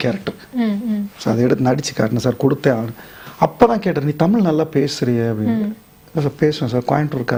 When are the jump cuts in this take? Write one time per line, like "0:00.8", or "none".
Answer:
none